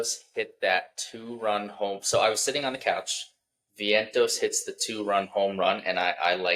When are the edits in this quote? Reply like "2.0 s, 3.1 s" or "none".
none

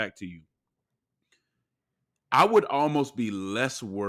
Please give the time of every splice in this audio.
none

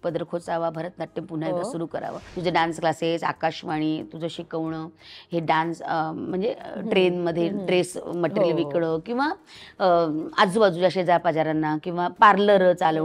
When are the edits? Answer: 2.2 s

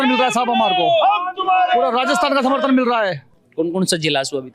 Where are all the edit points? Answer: none

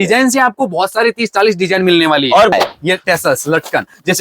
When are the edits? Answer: 2.5 s

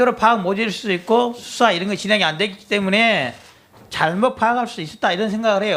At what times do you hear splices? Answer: 2.2 s

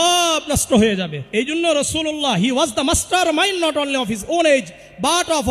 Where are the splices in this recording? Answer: 1.2 s

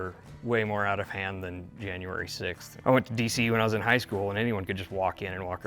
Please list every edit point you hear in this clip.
2.7 s

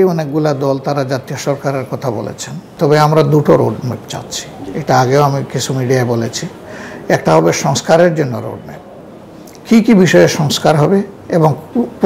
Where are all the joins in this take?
2.7 s

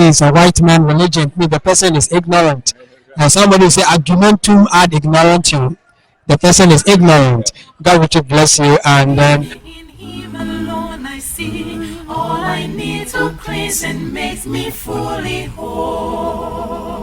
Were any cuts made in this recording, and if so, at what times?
9.6 s

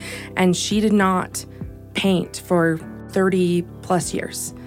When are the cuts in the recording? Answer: none

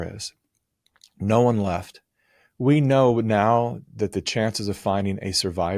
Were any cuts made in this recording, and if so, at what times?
none

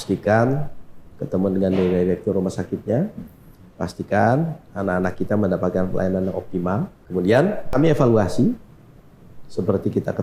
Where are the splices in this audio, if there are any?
7.0 s, 7.7 s

